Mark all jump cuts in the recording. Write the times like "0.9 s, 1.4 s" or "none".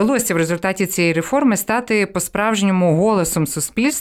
none